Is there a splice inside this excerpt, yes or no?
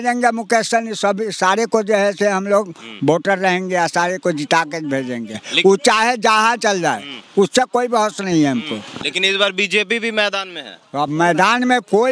yes